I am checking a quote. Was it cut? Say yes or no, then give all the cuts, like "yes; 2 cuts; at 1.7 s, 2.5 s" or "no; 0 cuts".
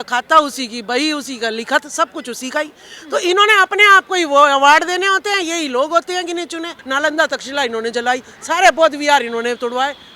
yes; 1 cut; at 6.8 s